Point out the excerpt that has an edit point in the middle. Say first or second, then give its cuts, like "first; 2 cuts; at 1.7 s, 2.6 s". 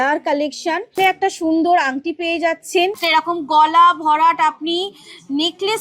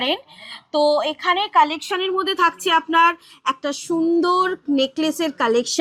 first; 2 cuts; at 1.0 s, 3.0 s